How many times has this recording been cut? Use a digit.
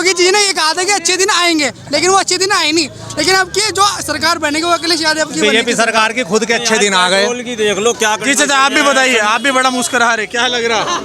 0